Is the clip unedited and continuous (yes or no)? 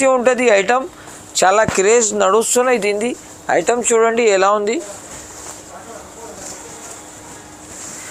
yes